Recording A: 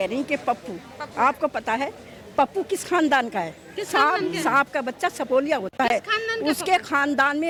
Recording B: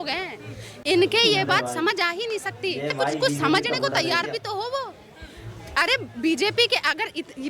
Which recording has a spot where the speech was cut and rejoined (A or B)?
B